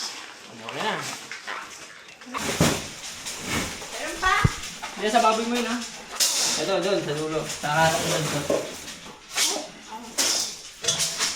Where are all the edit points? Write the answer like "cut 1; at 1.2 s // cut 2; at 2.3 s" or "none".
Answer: cut 1; at 2.4 s